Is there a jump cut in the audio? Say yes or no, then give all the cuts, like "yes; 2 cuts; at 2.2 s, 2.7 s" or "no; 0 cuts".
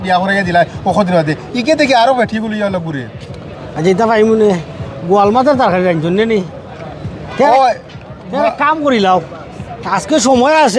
no; 0 cuts